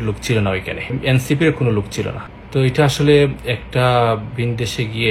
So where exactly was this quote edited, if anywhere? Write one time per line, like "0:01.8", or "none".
0:01.0
0:02.3